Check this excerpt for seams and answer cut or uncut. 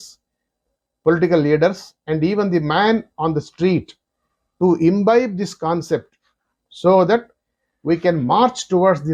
uncut